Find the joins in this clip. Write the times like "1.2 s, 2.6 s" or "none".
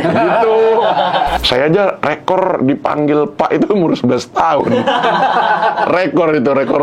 1.4 s